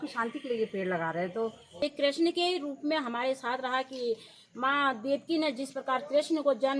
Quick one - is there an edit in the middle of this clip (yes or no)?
yes